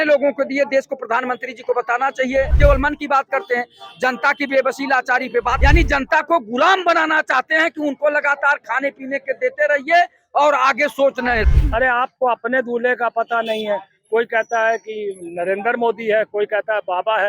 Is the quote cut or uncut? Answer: cut